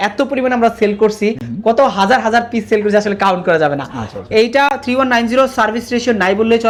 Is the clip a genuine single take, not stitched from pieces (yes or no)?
yes